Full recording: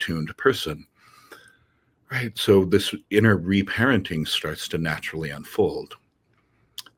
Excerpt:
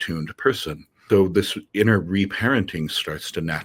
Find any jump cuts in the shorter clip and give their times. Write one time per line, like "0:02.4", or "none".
0:01.0

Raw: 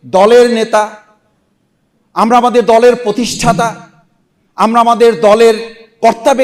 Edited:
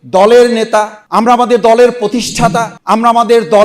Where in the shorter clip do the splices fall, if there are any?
0:01.0
0:02.7

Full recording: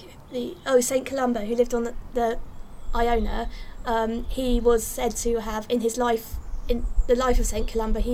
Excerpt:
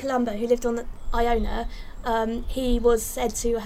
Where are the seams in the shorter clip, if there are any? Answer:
0:00.9

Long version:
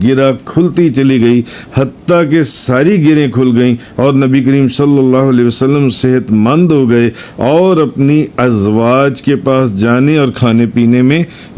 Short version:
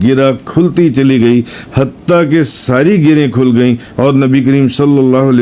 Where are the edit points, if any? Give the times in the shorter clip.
none

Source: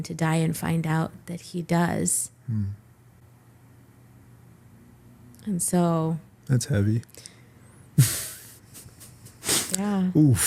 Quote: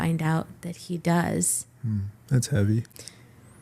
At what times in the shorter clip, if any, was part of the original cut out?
0:02.2

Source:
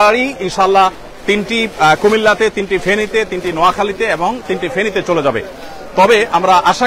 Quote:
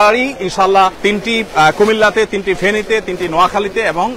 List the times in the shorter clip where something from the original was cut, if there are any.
0:01.0

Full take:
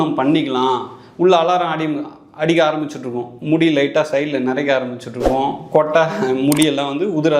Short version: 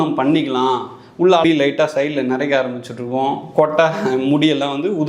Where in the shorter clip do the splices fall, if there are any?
0:01.4

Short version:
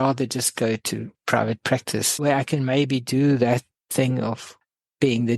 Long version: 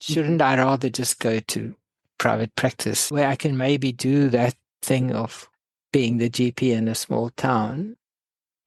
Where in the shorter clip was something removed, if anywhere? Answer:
0:01.1

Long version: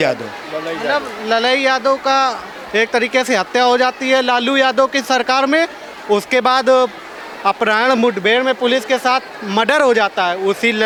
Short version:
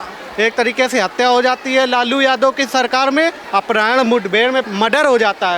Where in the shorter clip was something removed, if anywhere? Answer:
0:03.4
0:04.7

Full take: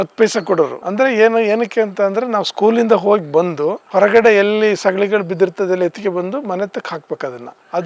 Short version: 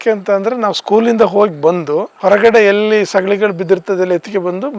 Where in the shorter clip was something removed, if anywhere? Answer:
none

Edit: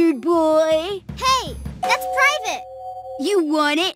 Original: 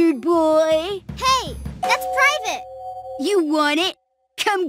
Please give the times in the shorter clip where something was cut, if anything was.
none

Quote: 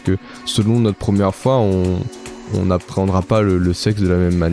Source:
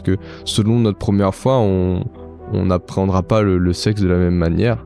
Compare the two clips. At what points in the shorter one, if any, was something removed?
none

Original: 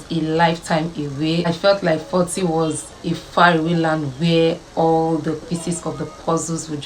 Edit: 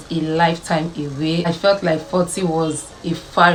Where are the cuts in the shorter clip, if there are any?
none

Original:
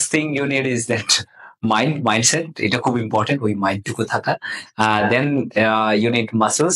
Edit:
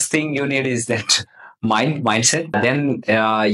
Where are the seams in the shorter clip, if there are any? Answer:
0:02.5

